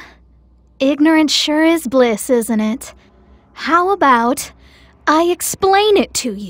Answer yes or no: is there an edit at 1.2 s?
no